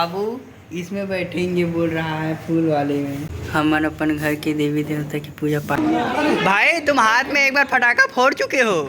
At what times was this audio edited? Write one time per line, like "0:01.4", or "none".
0:03.3
0:05.8